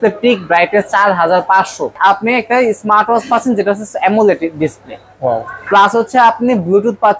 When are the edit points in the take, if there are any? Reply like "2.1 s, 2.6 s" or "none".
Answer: 2.0 s